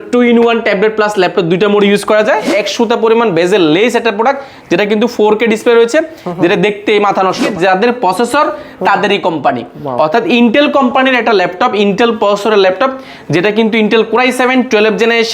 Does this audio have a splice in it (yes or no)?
yes